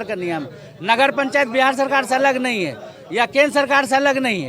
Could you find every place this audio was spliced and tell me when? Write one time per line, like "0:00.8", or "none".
none